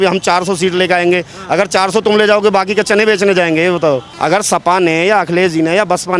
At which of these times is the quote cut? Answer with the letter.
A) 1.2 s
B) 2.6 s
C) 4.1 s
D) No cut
C